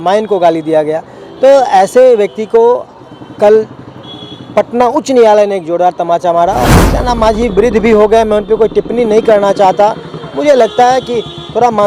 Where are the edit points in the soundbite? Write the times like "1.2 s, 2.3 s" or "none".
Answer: 6.6 s